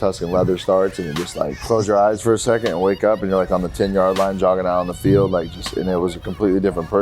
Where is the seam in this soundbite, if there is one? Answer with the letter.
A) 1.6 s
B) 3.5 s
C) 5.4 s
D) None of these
A